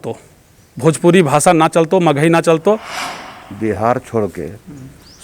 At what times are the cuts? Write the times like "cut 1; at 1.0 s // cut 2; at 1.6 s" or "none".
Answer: cut 1; at 3.0 s